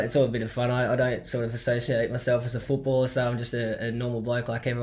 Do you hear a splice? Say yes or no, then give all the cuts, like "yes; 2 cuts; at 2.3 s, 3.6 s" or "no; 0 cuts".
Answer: no; 0 cuts